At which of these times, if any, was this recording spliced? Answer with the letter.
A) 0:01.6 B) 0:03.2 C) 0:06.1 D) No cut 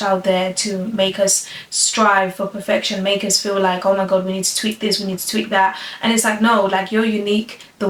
D